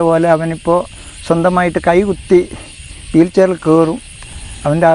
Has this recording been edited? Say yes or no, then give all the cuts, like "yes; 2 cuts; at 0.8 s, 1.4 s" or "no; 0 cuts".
no; 0 cuts